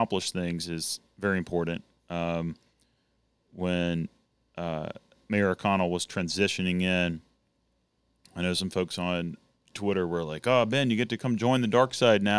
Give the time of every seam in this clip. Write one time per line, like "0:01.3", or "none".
none